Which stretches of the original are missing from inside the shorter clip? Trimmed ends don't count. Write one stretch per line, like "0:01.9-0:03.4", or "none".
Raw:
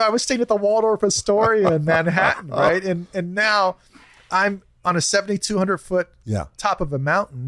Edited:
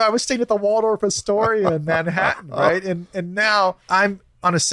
0:03.8-0:04.2